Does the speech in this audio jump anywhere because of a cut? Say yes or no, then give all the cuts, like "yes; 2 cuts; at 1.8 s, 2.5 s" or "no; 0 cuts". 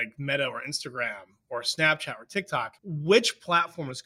yes; 1 cut; at 2.8 s